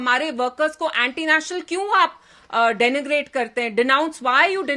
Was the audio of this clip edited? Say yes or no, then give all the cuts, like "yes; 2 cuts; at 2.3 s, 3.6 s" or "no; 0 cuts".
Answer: no; 0 cuts